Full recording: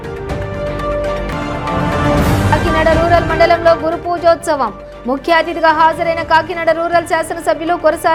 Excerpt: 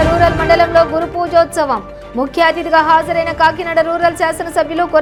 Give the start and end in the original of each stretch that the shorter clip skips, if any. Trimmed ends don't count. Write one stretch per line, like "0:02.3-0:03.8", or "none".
none